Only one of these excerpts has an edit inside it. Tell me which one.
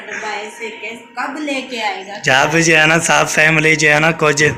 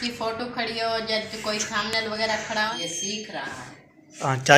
second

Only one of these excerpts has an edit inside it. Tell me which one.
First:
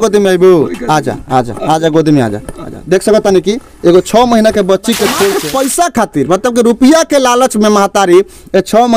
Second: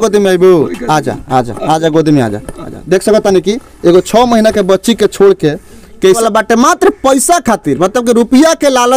first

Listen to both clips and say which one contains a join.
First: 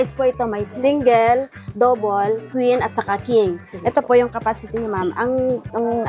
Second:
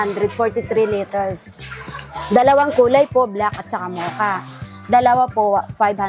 first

